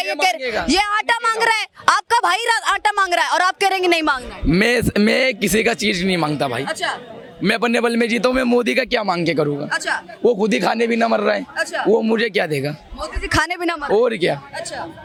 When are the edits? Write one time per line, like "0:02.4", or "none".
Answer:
none